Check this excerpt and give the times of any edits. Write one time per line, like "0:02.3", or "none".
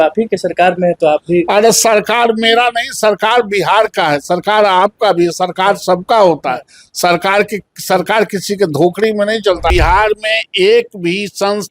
0:09.7